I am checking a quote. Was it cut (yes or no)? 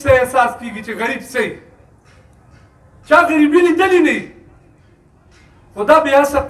no